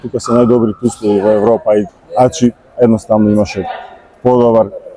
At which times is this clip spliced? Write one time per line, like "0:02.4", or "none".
0:01.9